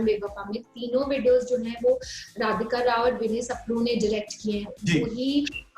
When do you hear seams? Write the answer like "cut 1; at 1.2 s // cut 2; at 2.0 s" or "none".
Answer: none